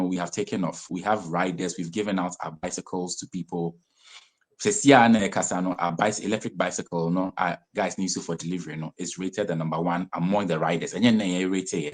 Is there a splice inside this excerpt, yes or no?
no